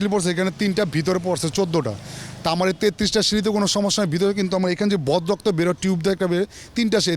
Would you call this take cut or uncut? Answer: uncut